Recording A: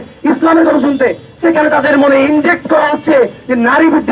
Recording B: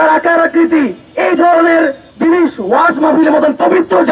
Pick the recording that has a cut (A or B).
B